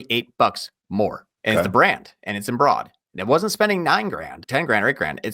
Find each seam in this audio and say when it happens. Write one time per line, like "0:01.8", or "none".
0:01.3
0:04.4